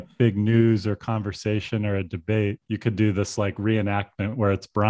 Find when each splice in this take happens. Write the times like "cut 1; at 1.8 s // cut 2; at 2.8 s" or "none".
cut 1; at 2.6 s